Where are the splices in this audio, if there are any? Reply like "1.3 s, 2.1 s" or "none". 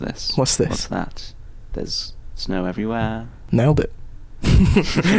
3.3 s